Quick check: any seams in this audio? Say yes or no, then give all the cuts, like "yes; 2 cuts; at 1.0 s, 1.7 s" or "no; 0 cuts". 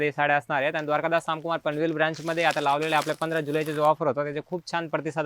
no; 0 cuts